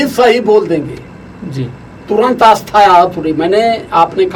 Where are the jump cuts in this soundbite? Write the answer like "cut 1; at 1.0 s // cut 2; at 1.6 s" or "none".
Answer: none